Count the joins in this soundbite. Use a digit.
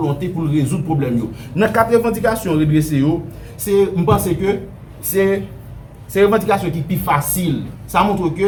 0